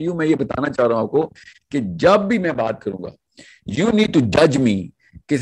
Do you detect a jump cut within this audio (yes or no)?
no